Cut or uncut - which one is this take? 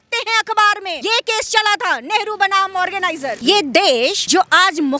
cut